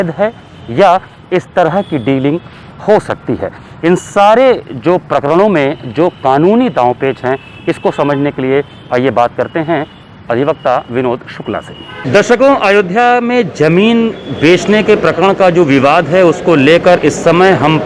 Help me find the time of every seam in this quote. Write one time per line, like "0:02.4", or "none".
none